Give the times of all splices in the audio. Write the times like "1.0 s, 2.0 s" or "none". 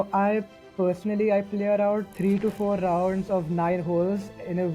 none